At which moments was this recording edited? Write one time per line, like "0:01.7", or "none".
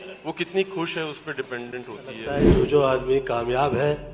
0:02.4

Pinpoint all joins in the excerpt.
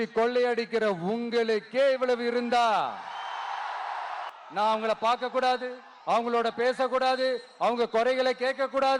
0:04.3

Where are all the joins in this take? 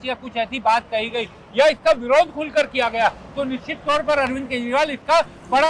none

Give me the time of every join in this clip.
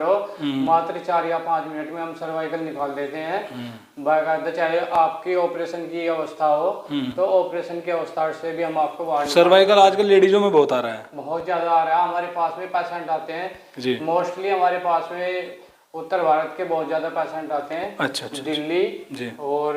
none

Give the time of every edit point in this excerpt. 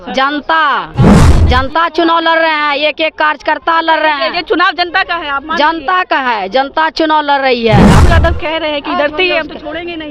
0:08.0

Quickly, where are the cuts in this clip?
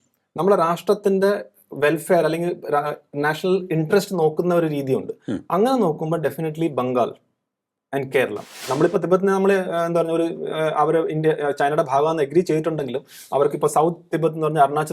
0:08.6

